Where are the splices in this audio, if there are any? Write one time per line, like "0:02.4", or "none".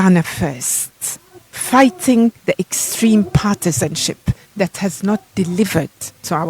0:02.4